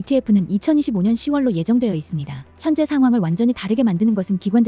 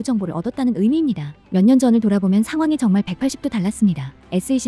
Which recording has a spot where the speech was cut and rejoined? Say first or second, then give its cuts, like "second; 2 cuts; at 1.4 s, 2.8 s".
first; 1 cut; at 2.4 s